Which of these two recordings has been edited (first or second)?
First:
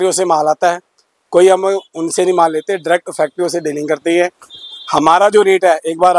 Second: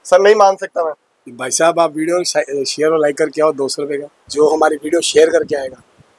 second